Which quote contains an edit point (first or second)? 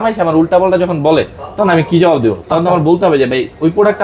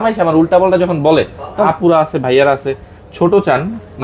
second